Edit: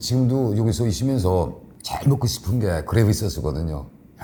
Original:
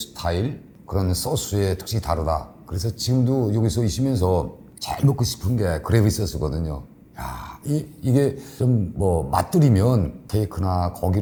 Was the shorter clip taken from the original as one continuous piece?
yes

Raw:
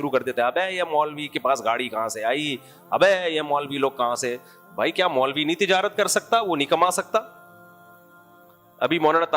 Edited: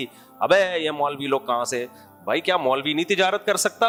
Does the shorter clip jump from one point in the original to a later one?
no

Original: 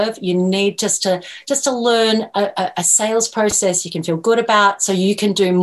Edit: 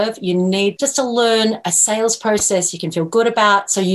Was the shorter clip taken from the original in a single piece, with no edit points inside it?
no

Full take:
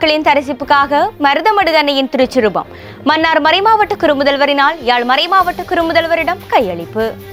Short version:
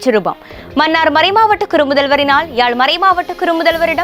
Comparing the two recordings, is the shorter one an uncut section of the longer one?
yes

